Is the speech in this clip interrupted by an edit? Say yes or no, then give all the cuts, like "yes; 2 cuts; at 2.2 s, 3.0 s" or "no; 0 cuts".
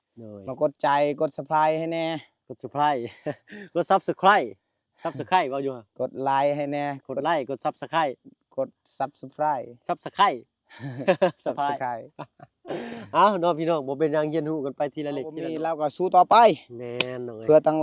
yes; 1 cut; at 15.6 s